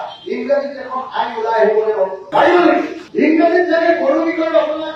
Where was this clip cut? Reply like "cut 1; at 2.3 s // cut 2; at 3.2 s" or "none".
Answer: none